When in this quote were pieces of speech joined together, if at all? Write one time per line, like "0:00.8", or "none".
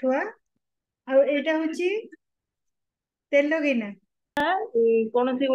0:04.4